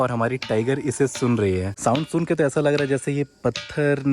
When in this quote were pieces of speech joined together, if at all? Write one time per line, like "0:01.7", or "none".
0:01.7

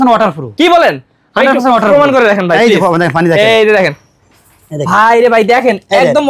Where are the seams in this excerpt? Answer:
none

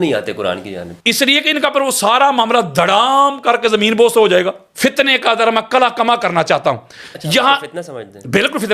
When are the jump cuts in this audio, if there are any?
0:04.6

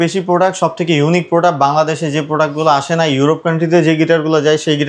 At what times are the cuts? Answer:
none

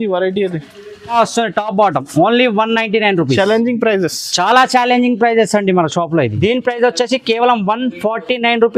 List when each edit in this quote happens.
0:01.1
0:06.3

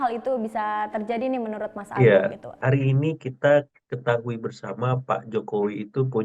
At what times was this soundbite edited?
0:01.9

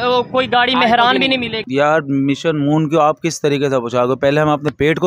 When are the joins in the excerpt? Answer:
0:01.6

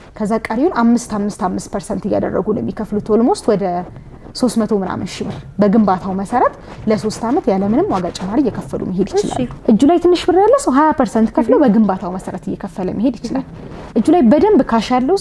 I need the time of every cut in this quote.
0:09.5

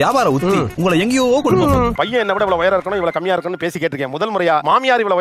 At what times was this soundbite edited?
0:01.9

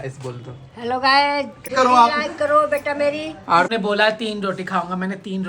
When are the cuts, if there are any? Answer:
0:01.7
0:03.7

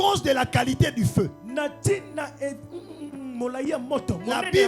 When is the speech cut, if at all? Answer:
none

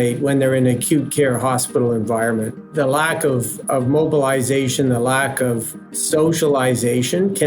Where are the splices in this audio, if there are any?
0:02.6
0:05.9

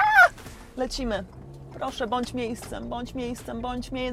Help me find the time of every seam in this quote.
none

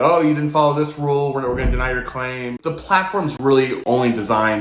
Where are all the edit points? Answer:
0:02.6

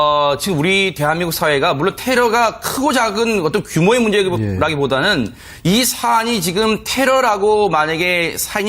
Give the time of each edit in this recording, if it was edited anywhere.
0:04.9

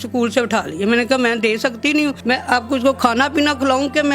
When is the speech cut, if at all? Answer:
0:02.2

